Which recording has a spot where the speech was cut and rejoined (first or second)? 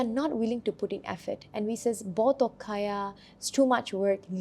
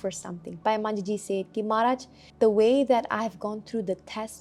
second